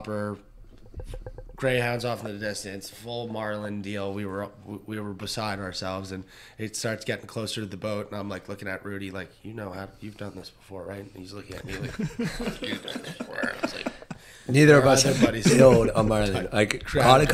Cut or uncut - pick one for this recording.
uncut